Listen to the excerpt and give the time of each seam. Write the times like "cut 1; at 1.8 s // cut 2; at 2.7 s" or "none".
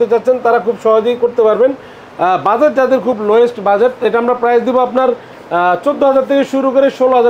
none